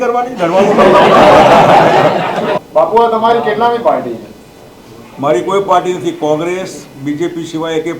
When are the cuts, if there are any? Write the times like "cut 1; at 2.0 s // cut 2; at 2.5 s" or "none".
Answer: cut 1; at 2.6 s